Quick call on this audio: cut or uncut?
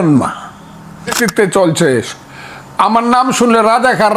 cut